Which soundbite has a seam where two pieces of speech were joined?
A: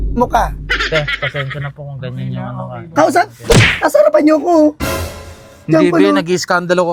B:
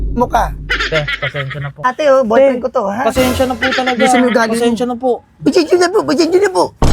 B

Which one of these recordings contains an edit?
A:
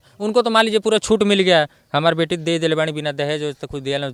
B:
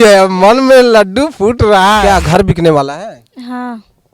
B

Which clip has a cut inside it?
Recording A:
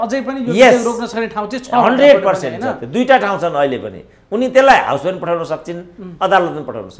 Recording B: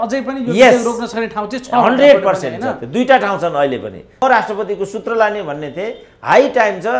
B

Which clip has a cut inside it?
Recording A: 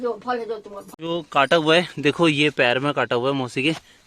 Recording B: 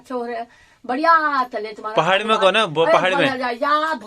A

